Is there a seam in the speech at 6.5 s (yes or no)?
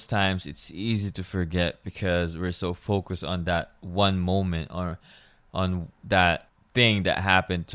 yes